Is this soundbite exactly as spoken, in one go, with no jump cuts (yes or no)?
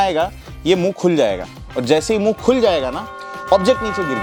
yes